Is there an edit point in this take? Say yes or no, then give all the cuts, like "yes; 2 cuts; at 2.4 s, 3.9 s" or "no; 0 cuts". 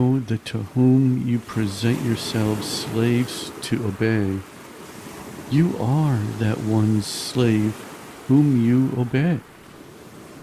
no; 0 cuts